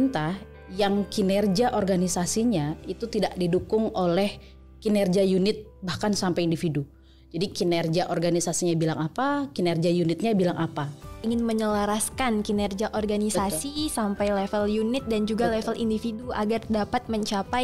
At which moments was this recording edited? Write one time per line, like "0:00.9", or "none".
0:11.2